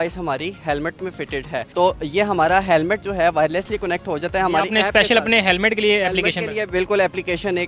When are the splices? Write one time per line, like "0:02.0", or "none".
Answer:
none